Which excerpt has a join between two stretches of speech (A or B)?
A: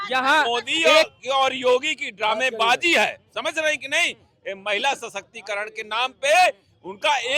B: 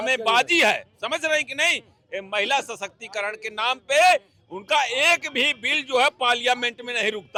A